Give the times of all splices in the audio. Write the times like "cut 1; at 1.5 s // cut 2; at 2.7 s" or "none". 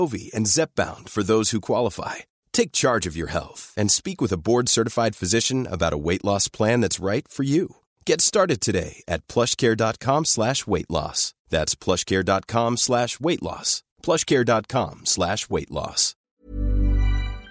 cut 1; at 16.3 s